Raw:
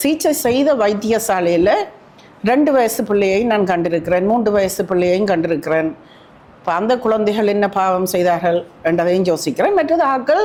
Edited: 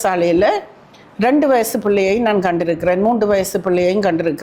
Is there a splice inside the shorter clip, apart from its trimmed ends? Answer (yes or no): no